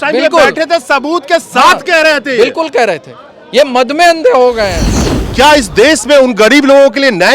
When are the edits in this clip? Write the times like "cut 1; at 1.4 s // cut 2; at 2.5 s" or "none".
cut 1; at 5.0 s